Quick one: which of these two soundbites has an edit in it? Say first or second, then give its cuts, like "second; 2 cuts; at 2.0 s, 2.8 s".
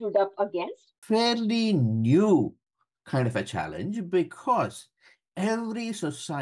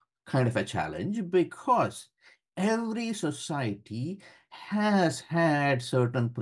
first; 1 cut; at 1.0 s